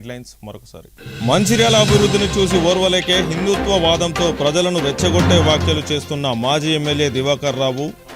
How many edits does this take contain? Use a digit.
0